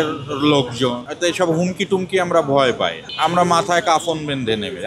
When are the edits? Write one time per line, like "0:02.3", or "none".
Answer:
0:01.1
0:03.0